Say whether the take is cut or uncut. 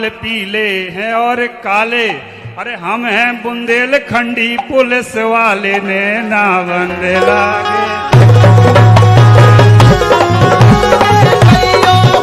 uncut